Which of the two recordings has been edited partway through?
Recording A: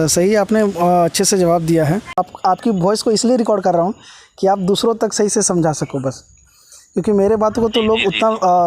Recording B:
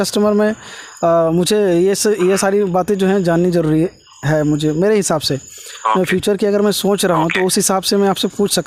A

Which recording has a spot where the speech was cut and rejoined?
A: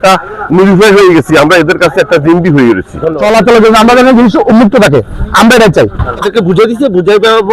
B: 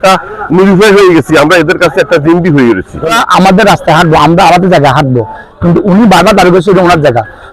A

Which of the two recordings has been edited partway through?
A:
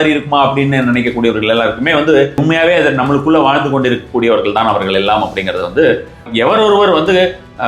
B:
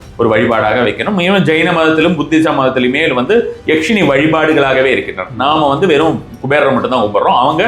A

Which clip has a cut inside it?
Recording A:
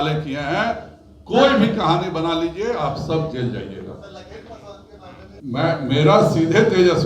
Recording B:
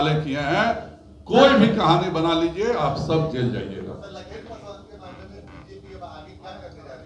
A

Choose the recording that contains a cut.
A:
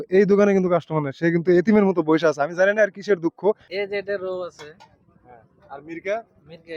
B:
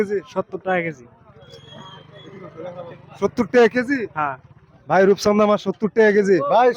A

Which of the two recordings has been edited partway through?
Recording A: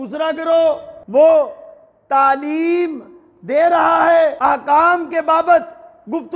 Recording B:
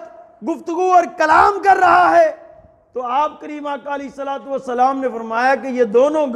A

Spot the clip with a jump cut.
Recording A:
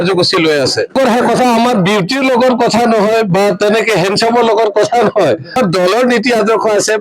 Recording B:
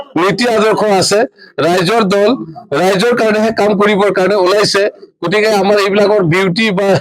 A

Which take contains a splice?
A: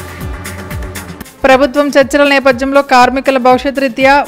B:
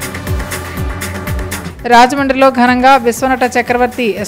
A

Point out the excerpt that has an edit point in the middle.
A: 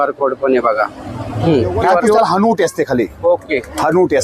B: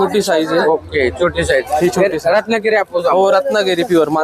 A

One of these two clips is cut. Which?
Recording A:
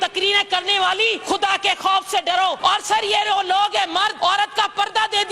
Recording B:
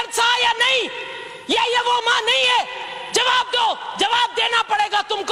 A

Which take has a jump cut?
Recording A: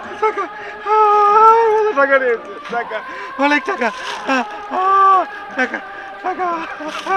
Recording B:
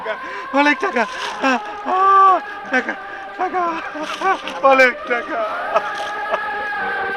B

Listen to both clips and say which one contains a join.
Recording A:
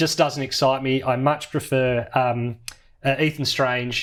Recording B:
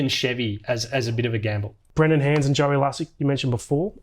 B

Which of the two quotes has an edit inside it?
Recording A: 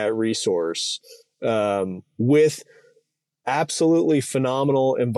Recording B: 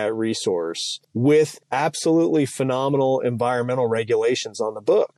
B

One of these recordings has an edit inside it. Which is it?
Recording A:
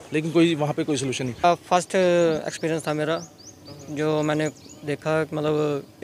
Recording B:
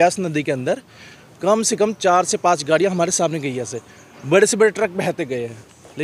A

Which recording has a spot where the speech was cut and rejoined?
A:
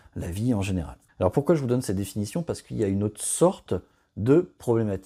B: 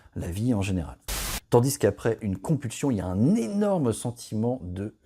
B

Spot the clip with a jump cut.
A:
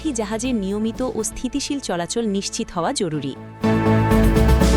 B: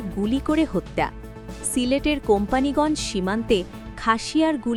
A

